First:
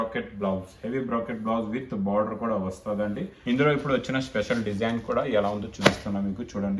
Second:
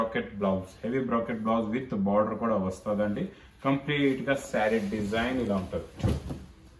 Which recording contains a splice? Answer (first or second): first